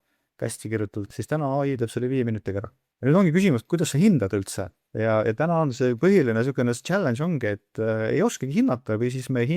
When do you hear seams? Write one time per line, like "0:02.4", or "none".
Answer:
0:02.8